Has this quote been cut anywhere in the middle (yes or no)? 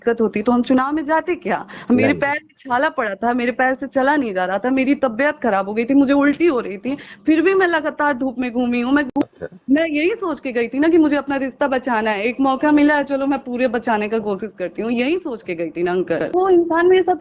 yes